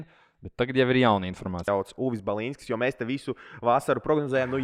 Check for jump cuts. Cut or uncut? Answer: cut